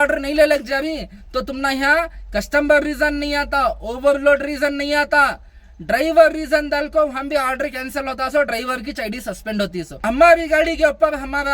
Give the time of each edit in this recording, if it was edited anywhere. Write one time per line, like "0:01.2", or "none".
0:09.9